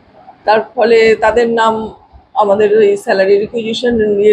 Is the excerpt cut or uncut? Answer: uncut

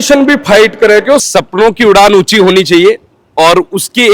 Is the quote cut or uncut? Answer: cut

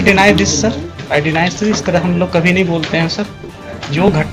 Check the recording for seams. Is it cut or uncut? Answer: cut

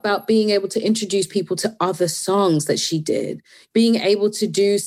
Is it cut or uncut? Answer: cut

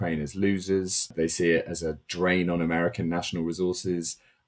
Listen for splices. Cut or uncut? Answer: cut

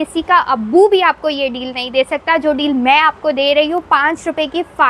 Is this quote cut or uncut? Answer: uncut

